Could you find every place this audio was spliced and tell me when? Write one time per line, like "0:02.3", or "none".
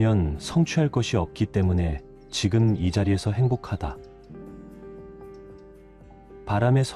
0:04.0
0:06.1